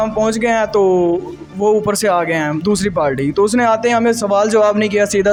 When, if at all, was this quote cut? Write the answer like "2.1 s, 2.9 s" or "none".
none